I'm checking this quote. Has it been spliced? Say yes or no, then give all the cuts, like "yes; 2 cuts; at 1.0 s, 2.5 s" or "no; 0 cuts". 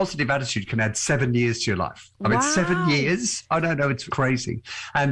yes; 1 cut; at 4.1 s